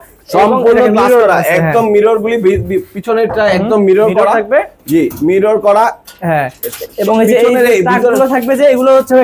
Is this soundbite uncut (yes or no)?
yes